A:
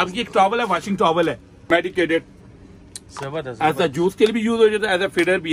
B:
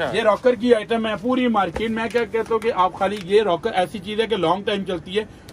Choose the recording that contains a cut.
A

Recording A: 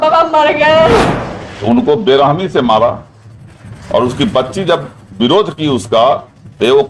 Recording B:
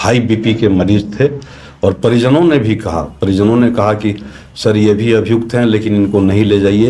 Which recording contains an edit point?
A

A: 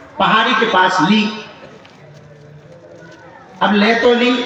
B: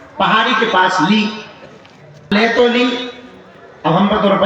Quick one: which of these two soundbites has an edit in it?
B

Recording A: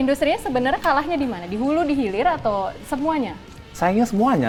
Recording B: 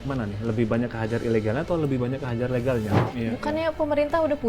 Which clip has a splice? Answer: B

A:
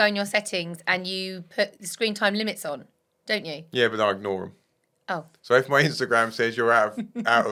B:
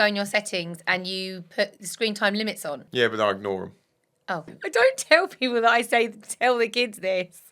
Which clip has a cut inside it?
B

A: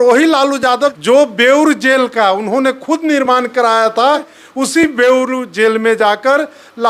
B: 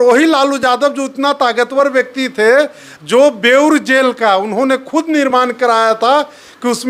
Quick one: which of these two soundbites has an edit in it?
A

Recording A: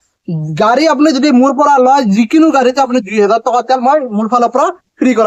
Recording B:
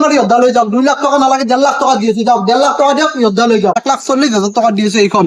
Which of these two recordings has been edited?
B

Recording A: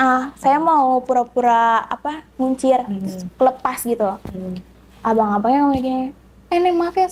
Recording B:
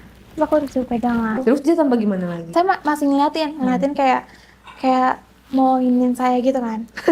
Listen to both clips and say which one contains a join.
B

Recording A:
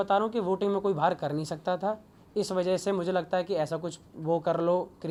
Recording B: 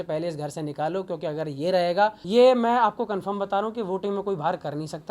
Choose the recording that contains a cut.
B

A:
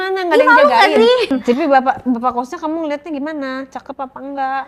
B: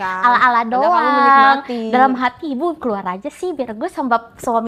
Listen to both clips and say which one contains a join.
A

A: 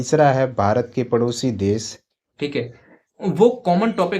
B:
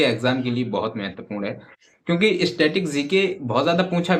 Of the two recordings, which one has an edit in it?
A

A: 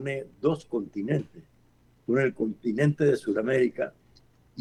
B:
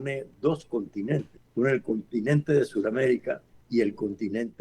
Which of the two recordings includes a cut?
B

